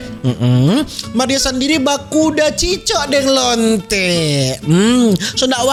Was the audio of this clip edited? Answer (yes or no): no